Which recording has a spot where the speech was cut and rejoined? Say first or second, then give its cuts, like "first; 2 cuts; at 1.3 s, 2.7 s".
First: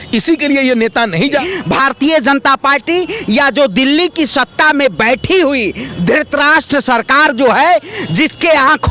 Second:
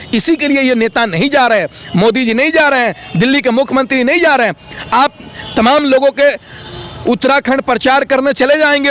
first; 1 cut; at 1.4 s